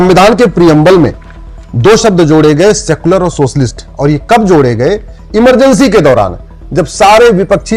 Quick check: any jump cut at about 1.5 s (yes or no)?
no